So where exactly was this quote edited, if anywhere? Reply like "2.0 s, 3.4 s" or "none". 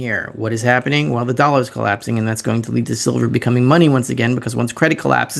none